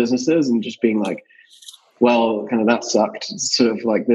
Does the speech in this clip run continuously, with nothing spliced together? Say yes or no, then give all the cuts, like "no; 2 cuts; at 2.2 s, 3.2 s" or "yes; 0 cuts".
yes; 0 cuts